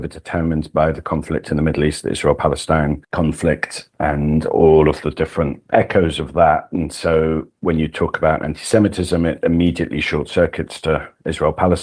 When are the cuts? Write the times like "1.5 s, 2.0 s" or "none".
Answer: 3.0 s